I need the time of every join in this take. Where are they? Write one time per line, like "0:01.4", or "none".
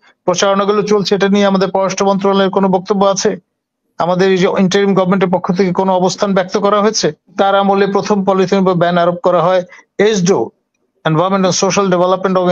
0:07.3